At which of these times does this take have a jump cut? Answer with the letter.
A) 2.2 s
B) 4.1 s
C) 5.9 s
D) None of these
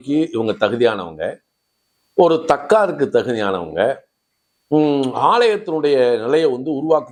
D